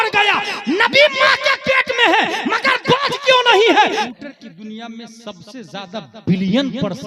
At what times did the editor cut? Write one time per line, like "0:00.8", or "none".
0:04.1